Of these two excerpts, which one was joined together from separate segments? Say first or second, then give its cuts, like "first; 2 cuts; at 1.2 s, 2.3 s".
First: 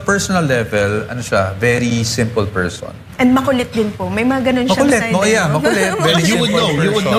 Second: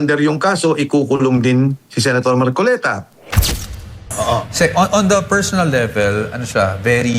second; 1 cut; at 3.6 s